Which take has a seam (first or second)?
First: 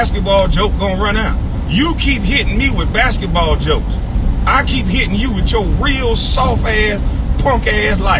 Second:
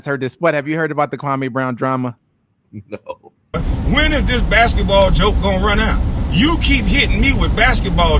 second